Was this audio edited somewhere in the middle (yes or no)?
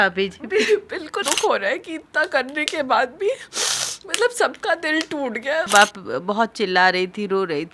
yes